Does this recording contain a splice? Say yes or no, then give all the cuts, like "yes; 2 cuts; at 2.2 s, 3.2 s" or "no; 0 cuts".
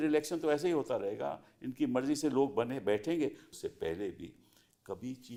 no; 0 cuts